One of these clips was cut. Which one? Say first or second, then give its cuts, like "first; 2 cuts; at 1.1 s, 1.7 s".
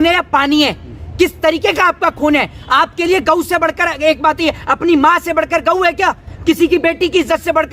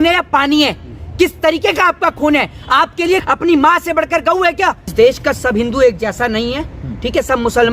second; 2 cuts; at 3.2 s, 4.9 s